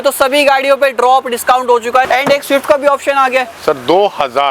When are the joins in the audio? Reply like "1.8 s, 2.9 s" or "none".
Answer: none